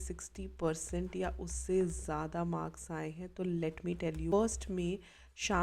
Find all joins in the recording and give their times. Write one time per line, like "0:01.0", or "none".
0:04.3